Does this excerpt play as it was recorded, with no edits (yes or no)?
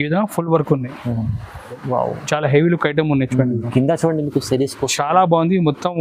no